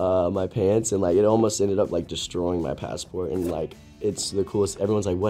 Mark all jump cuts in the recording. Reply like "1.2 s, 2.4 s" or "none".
none